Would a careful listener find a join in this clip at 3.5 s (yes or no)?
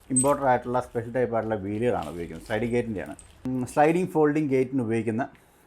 yes